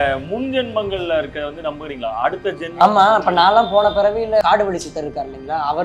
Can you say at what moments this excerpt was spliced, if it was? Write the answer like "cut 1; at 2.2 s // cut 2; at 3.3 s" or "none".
cut 1; at 4.4 s